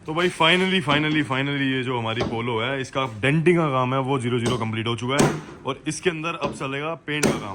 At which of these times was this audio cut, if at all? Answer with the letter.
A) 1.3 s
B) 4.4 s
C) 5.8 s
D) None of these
D